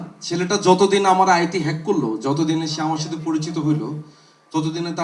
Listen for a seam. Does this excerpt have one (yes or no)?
no